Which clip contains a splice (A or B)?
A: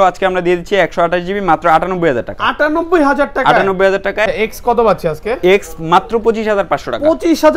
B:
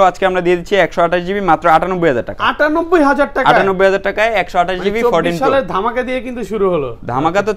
A